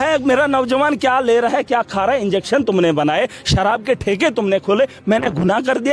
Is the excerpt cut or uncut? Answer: uncut